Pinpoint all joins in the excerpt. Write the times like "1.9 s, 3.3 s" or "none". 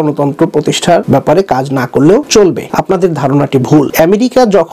1.0 s, 2.5 s, 3.9 s